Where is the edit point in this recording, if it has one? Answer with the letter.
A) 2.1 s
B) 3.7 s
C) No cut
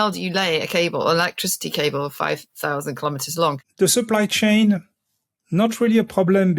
B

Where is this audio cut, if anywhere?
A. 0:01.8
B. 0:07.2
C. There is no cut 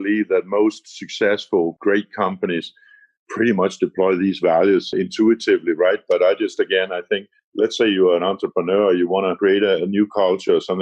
A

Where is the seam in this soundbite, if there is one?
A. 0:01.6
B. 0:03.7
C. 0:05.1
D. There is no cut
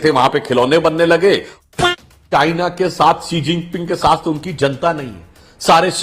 A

